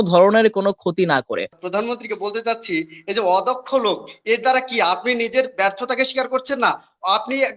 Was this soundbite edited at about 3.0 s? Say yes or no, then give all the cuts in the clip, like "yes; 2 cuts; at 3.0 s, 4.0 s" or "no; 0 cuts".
no; 1 cut; at 1.6 s